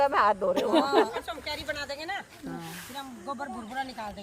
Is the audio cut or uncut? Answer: cut